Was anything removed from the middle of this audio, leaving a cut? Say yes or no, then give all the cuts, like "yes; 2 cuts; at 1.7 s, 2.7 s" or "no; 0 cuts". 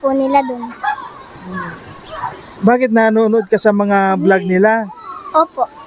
no; 0 cuts